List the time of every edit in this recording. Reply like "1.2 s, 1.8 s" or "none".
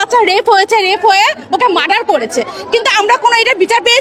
none